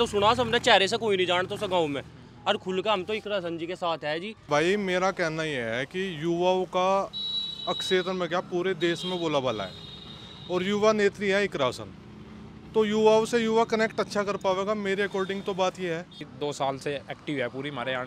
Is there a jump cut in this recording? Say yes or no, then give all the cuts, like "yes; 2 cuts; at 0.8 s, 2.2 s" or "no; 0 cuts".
yes; 2 cuts; at 4.5 s, 16.3 s